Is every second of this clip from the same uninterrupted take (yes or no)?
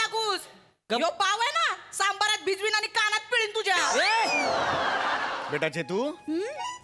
no